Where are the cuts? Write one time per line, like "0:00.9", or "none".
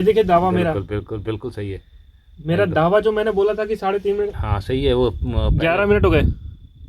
0:04.3

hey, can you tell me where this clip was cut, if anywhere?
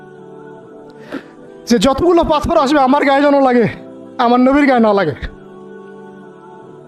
none

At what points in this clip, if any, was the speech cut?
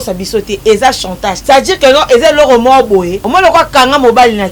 0:01.4
0:03.2

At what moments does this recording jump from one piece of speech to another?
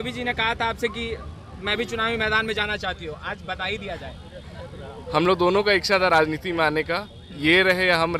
none

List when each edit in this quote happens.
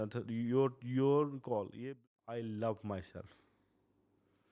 0:01.7

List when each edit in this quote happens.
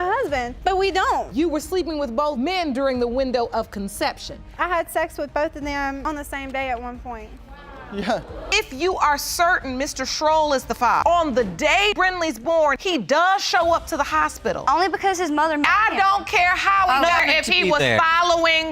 0:08.5
0:11.9
0:17.2

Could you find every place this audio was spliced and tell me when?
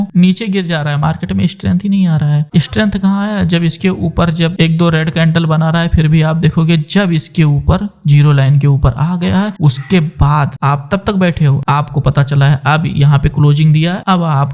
none

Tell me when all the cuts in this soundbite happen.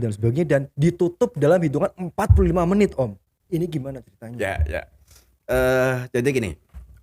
none

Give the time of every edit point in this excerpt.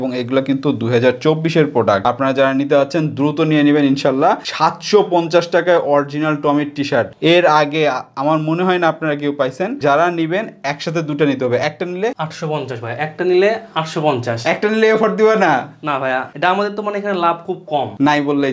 none

